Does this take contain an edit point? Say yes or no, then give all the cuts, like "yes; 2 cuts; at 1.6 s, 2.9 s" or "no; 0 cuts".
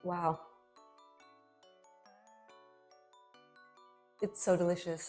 yes; 2 cuts; at 1.0 s, 4.2 s